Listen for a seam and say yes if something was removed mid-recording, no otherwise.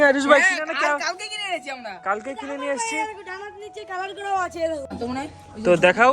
yes